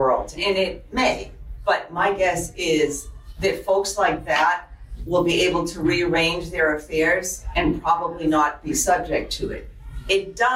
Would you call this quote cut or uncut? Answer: uncut